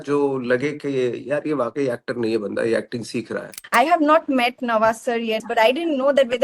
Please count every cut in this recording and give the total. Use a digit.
2